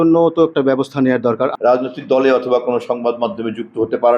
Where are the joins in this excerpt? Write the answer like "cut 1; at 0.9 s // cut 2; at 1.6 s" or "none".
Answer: cut 1; at 1.5 s